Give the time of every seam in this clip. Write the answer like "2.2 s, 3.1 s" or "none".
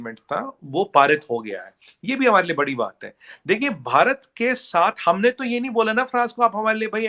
none